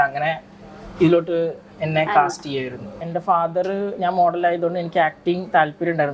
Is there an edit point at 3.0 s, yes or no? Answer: yes